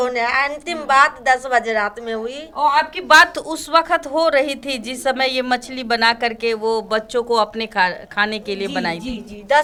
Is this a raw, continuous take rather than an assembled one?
yes; 0 cuts

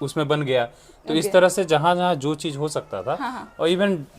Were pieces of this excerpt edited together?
no; 0 cuts

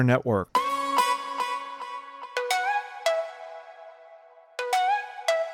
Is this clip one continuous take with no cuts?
yes; 0 cuts

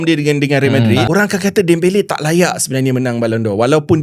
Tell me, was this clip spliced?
yes; 1 cut; at 1.1 s

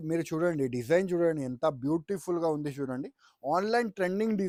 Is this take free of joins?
yes; 0 cuts

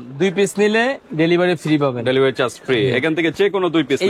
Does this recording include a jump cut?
no; 0 cuts

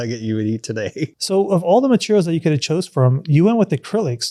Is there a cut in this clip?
no; 0 cuts

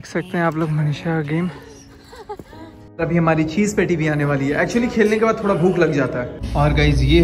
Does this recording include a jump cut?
yes; 2 cuts; at 2.8 s, 6.3 s

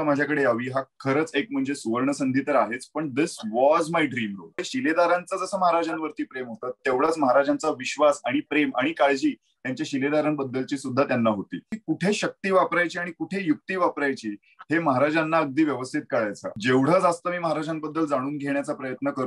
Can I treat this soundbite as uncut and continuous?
no; 3 cuts; at 4.6 s, 11.7 s, 16.6 s

